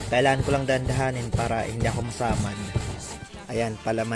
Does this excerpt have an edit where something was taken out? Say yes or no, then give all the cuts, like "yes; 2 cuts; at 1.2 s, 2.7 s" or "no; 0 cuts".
yes; 1 cut; at 3.1 s